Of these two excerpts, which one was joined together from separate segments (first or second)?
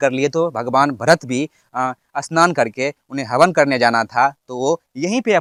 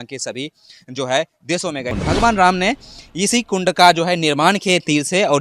second